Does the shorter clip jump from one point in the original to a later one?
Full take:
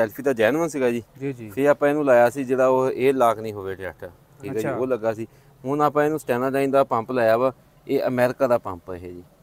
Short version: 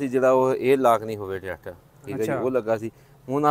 no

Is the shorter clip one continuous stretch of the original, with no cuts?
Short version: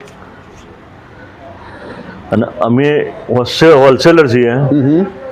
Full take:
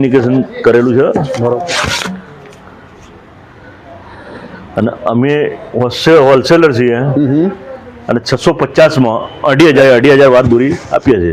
yes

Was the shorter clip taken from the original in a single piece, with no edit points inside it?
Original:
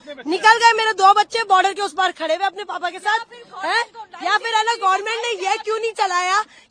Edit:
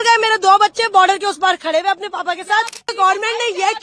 no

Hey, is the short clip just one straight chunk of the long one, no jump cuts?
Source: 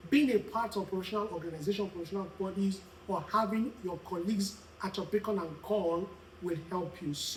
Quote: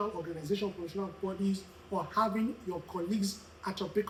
yes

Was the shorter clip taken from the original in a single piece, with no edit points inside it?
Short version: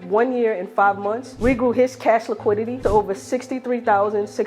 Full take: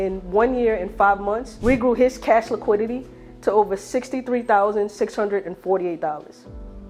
no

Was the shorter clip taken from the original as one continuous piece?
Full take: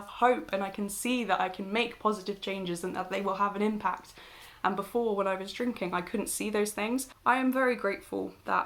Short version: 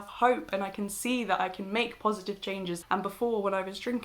no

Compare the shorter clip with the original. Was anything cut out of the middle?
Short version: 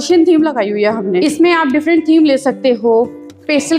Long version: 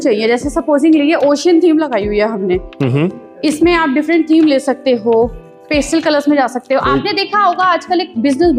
yes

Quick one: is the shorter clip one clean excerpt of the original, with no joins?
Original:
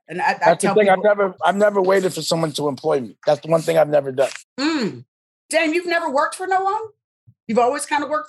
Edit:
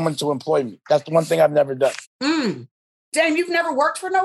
yes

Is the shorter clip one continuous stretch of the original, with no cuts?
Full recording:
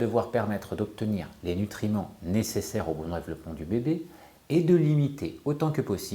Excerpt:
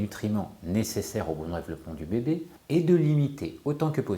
no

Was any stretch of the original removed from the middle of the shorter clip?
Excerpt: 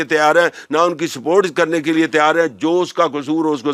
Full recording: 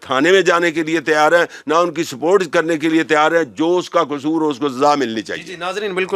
no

